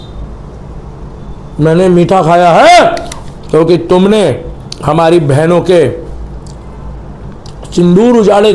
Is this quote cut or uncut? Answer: uncut